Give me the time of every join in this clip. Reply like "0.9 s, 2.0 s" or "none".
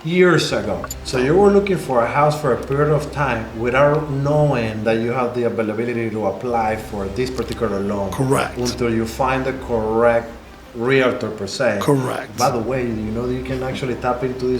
0.9 s